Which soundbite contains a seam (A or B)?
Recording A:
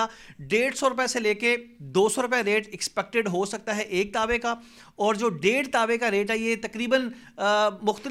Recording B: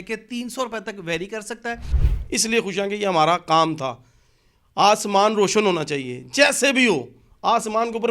B